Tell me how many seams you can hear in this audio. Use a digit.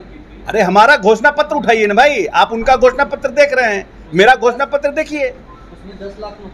0